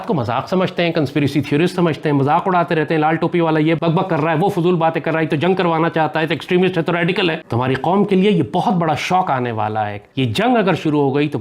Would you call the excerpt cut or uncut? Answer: cut